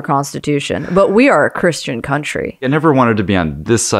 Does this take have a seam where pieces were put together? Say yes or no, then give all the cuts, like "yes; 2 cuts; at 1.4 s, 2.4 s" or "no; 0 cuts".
yes; 1 cut; at 2.6 s